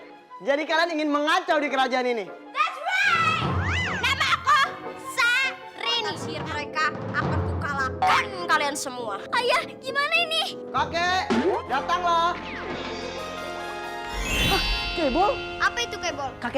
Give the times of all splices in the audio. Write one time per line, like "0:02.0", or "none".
0:06.2